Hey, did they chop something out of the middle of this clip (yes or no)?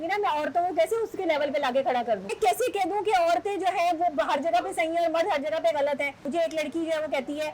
yes